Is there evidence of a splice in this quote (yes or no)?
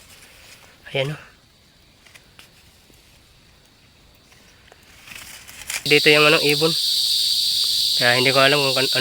yes